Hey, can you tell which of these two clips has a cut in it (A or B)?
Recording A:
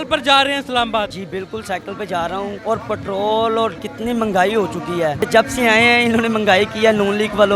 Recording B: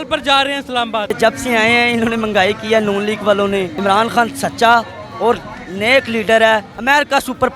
B